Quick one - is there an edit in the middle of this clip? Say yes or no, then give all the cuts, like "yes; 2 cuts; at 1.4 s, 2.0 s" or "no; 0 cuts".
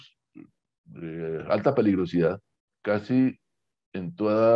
no; 0 cuts